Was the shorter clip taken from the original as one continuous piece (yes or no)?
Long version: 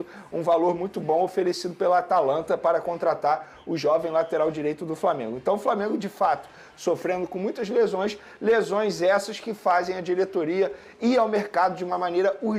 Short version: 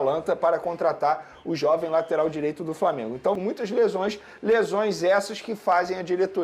no